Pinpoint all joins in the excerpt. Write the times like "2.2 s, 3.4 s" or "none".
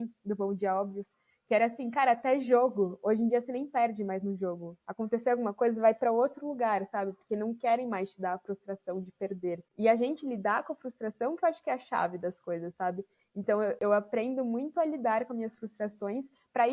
9.7 s